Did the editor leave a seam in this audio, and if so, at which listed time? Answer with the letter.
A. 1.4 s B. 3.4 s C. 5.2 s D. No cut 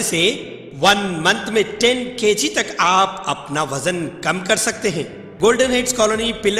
C